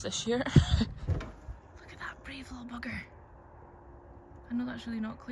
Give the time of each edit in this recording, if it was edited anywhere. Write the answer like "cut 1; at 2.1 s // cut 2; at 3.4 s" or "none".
cut 1; at 1.1 s